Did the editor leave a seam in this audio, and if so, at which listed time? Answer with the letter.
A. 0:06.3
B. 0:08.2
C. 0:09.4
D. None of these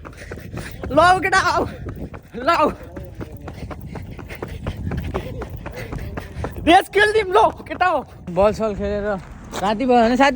B